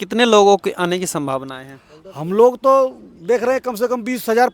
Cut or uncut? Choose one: uncut